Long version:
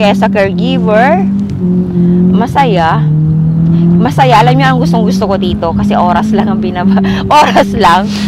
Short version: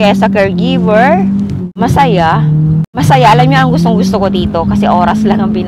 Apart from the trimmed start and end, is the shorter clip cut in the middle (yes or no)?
yes